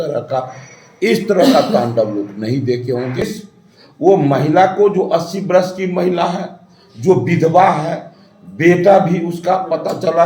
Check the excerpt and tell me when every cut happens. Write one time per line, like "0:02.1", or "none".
0:03.2